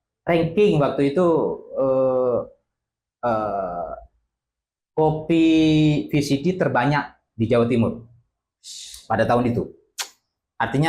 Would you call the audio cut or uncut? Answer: uncut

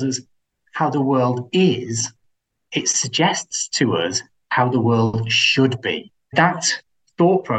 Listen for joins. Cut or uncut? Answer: cut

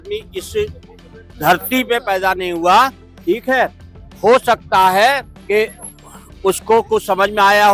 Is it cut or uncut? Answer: uncut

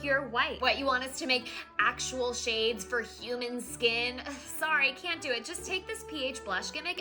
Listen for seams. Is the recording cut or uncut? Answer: uncut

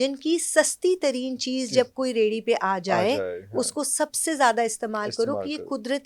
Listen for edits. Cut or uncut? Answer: uncut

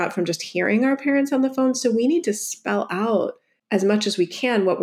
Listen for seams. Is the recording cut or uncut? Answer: cut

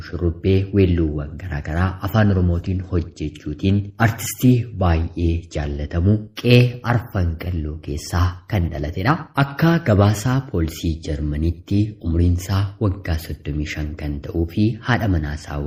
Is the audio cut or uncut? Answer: uncut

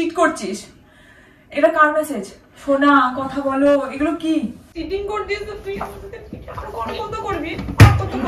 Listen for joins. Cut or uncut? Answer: cut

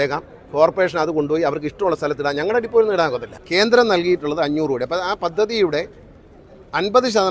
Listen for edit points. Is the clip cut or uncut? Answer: cut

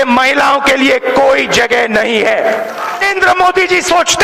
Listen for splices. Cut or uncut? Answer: cut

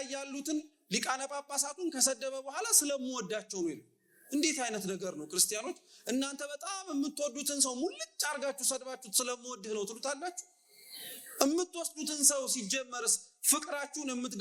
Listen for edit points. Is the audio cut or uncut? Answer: uncut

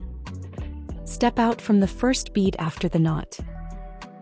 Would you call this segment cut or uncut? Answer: cut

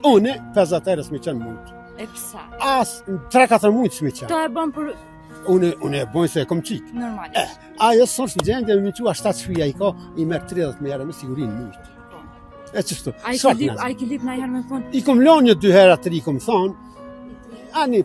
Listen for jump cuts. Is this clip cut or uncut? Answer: uncut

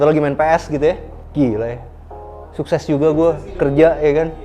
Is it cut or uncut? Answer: cut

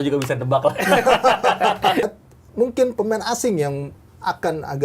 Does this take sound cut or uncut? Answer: cut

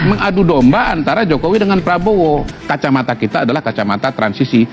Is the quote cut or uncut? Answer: cut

